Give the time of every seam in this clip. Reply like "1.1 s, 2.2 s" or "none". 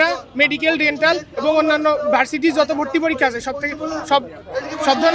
none